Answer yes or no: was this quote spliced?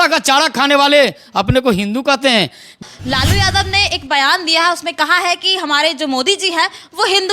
yes